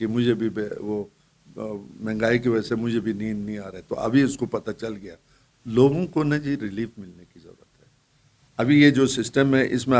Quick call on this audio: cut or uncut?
uncut